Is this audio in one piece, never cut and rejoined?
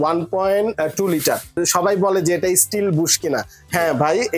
no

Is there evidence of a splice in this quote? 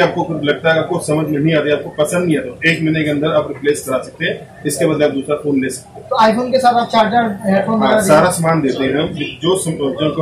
no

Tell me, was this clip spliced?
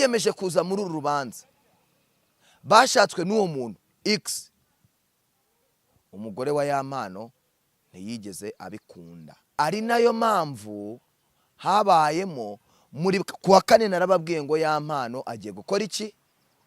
yes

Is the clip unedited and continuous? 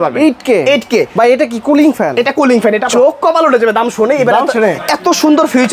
no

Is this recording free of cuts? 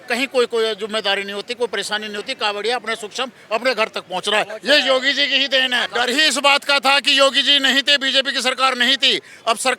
no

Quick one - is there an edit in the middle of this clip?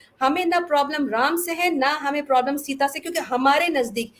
no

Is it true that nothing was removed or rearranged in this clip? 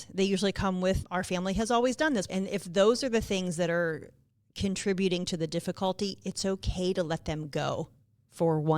no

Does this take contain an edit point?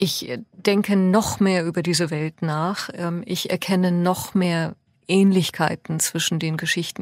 no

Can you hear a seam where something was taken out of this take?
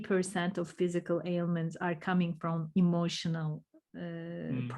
no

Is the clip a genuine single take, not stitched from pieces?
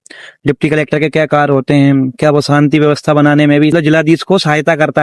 no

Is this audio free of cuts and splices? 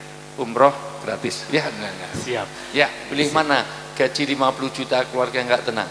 no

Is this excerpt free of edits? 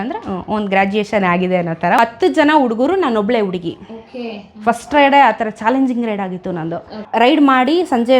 no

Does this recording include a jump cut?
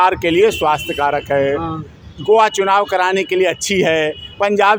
no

